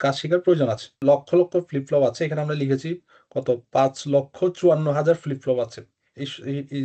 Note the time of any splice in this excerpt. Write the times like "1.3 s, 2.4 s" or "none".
1.0 s